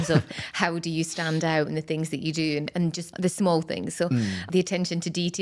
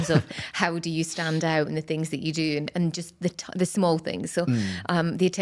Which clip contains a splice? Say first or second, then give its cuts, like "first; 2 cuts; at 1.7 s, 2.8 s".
first; 2 cuts; at 3.1 s, 4.5 s